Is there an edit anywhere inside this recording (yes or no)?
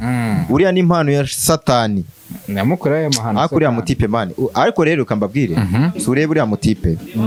no